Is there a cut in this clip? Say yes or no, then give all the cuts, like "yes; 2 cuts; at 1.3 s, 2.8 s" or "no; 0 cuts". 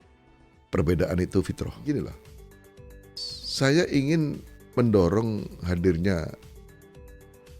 yes; 1 cut; at 1.7 s